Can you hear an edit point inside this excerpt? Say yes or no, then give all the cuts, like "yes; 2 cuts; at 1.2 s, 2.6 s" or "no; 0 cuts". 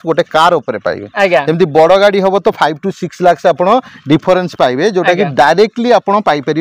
no; 0 cuts